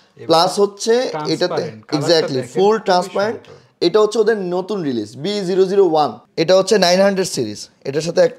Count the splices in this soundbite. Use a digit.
1